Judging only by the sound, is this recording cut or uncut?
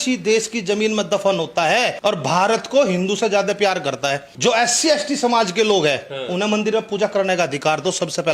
cut